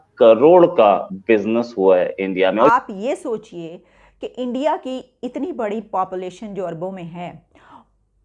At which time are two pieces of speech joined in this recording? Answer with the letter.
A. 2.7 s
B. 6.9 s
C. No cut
A